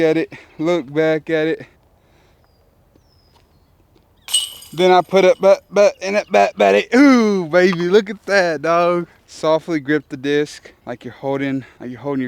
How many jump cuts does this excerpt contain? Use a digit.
1